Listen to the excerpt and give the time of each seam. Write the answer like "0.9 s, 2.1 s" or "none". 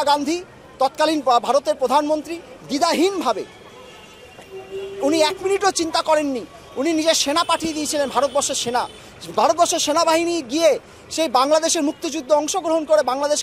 none